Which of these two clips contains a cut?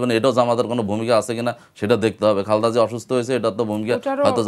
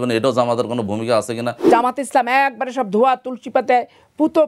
second; 1 cut; at 1.7 s

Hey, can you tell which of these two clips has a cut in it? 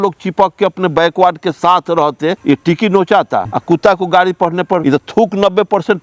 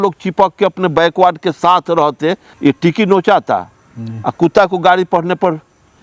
first; 3 cuts; at 2.4 s, 3.5 s, 4.8 s

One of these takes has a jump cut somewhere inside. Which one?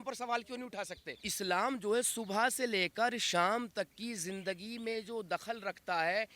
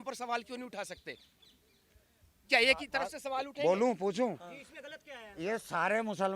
first; 1 cut; at 1.3 s

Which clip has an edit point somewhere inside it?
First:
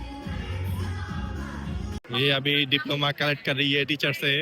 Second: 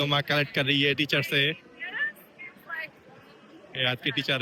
first; 1 cut; at 2.0 s

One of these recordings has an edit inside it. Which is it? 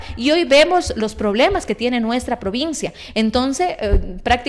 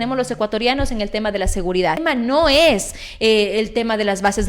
second; 1 cut; at 2.0 s

